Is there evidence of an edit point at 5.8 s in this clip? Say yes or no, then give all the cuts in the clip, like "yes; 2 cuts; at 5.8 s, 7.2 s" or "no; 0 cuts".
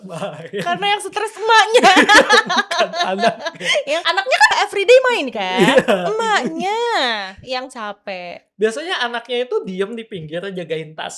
no; 1 cut; at 4.5 s